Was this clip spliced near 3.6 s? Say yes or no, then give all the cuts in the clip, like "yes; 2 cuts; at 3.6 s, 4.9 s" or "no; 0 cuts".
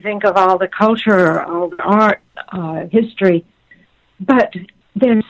no; 0 cuts